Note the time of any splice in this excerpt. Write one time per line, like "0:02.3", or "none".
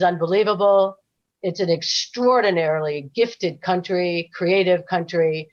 none